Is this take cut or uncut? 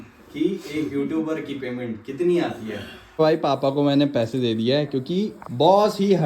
cut